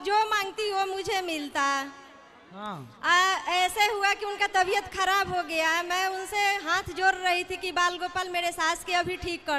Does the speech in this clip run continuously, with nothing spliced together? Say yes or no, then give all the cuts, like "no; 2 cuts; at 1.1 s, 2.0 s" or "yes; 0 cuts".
yes; 0 cuts